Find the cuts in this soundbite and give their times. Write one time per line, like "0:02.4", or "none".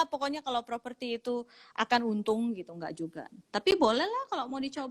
none